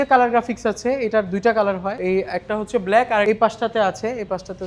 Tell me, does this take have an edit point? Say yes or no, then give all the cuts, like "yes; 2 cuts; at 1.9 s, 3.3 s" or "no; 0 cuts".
yes; 2 cuts; at 1.9 s, 3.2 s